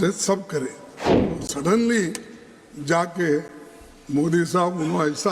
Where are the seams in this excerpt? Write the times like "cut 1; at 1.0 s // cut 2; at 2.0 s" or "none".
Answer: cut 1; at 1.4 s